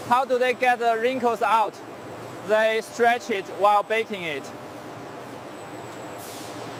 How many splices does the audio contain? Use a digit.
0